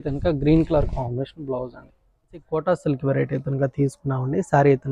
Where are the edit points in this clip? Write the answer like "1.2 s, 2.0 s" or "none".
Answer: 2.4 s